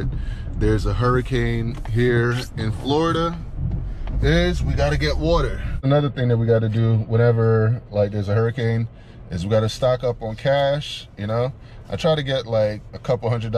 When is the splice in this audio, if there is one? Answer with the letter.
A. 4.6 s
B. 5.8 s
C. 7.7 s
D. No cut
B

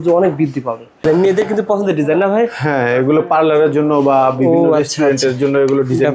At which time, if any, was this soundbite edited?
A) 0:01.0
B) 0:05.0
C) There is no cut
A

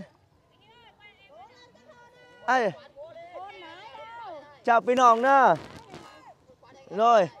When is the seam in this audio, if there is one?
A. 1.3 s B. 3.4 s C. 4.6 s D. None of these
D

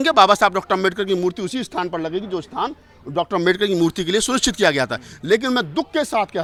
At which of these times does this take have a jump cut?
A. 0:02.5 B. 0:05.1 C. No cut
C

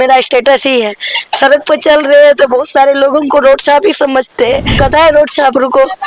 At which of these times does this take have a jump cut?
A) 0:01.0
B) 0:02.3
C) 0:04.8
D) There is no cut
C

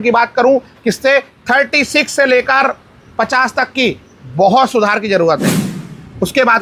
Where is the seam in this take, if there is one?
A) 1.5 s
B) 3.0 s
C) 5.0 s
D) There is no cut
D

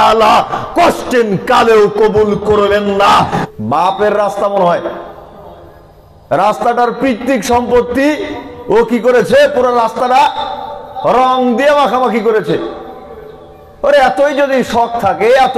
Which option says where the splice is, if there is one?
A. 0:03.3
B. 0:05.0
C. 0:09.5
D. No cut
A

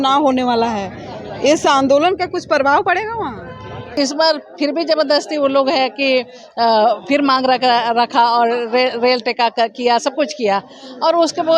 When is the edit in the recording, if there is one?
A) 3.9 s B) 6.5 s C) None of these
A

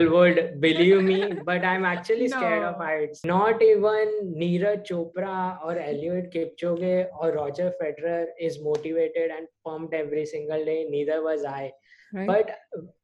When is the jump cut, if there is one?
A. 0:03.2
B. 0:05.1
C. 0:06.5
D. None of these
A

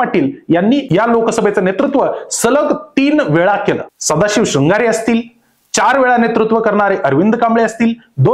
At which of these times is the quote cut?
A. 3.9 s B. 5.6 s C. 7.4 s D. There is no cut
A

